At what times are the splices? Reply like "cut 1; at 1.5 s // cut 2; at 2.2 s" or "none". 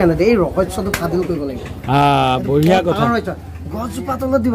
none